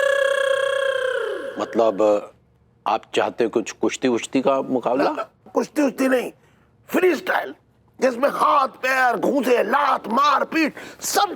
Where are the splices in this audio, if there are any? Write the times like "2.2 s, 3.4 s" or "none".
none